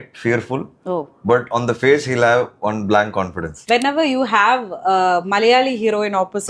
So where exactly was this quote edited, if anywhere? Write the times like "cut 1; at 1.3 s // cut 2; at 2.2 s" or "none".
cut 1; at 3.5 s

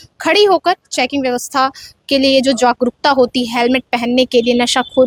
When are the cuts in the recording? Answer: none

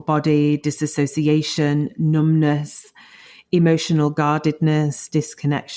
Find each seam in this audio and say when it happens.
none

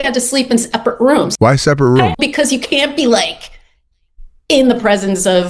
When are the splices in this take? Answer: cut 1; at 1.3 s // cut 2; at 2.1 s

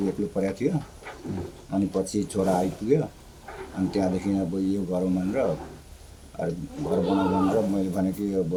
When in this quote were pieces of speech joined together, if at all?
none

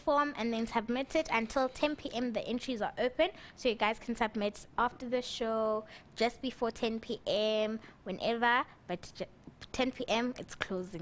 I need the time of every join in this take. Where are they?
cut 1; at 2.2 s

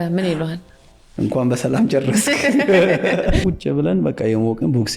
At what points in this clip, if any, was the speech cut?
cut 1; at 3.4 s

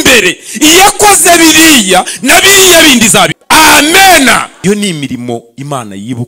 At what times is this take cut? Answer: cut 1; at 3.4 s // cut 2; at 4.5 s

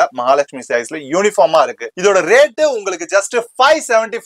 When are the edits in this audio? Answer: cut 1; at 1.9 s

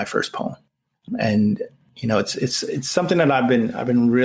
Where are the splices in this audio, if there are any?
cut 1; at 1.0 s // cut 2; at 1.8 s

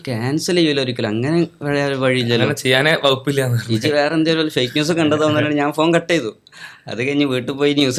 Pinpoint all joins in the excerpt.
none

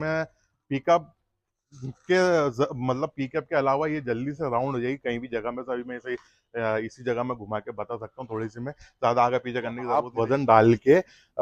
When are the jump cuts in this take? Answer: cut 1; at 10.1 s

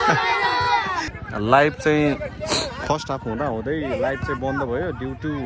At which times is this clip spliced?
cut 1; at 1.1 s

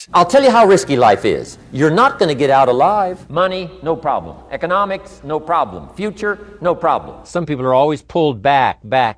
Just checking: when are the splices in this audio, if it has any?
cut 1; at 3.2 s // cut 2; at 7.3 s

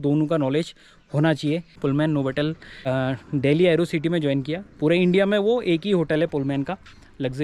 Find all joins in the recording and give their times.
cut 1; at 1.8 s // cut 2; at 2.9 s

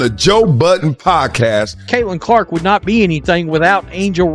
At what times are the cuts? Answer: cut 1; at 1.8 s

